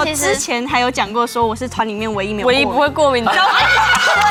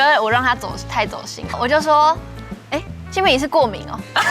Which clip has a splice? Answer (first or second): second